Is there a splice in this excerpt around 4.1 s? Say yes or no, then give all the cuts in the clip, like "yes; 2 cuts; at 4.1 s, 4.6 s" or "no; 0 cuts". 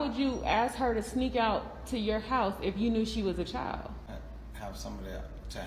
yes; 1 cut; at 4.1 s